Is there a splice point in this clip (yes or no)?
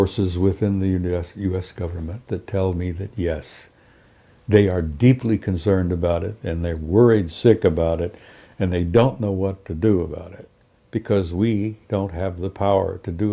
no